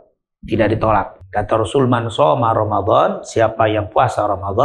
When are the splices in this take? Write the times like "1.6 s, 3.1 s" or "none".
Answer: 1.2 s